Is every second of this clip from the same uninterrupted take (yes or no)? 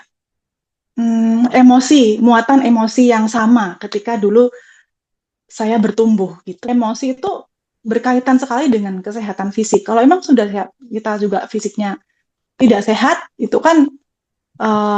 no